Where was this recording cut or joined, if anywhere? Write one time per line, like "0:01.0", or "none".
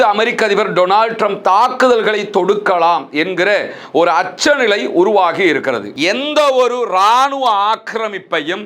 0:05.9